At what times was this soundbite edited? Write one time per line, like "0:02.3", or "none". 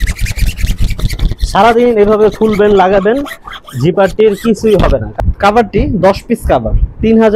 0:05.1